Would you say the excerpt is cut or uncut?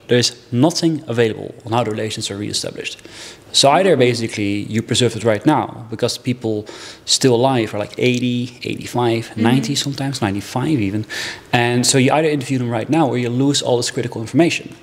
uncut